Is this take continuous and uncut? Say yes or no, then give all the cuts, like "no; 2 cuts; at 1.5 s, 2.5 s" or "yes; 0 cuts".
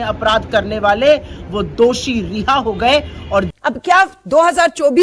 no; 1 cut; at 3.5 s